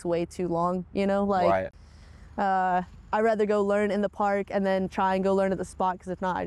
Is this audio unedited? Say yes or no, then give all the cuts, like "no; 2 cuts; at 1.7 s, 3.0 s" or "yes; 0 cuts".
yes; 0 cuts